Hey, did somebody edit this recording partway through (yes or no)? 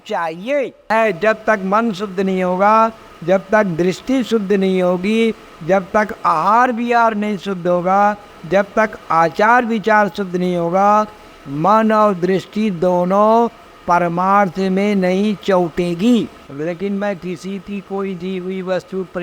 yes